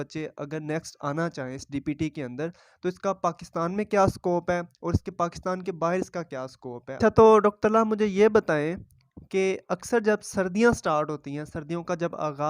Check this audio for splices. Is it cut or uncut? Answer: cut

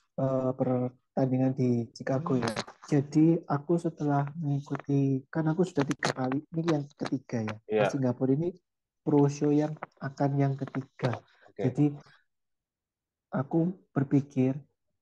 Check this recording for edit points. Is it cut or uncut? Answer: cut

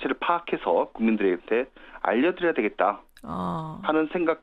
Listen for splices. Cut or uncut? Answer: uncut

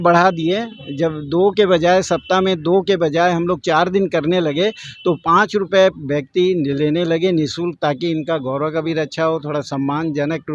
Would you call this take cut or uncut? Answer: uncut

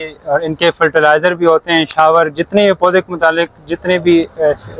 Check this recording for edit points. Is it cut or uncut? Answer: uncut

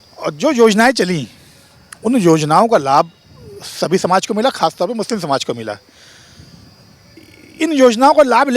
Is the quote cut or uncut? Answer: uncut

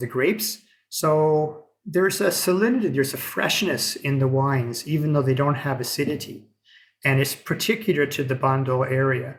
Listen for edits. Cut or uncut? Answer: uncut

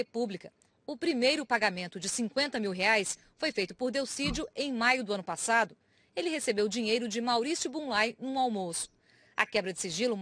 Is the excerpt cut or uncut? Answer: cut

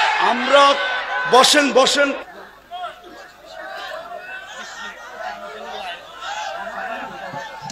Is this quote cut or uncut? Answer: cut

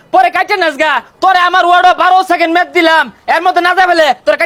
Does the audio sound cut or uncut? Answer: uncut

